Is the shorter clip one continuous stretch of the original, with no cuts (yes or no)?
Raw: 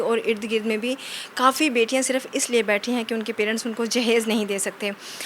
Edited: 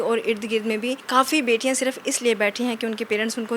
no